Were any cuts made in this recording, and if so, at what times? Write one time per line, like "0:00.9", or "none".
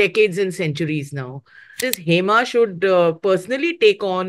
0:01.8